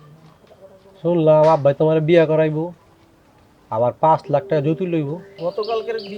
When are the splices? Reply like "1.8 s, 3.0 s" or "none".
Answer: 5.3 s